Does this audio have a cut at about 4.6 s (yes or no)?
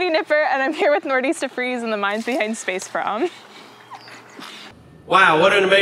yes